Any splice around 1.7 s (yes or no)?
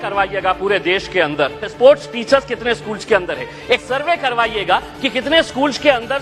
yes